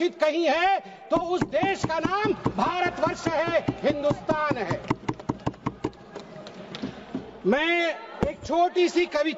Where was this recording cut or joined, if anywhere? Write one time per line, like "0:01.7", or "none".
none